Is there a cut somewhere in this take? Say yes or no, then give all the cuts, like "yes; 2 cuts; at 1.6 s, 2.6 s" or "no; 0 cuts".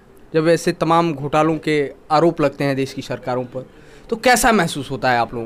no; 0 cuts